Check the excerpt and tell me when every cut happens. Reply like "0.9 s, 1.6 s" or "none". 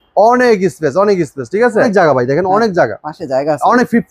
1.9 s